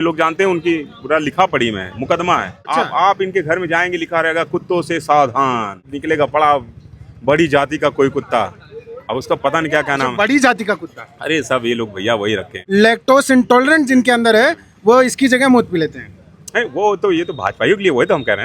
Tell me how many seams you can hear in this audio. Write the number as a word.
three